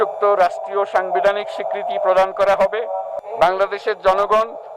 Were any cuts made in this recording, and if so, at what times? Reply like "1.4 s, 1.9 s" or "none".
3.1 s